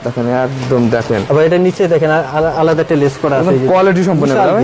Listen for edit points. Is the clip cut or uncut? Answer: uncut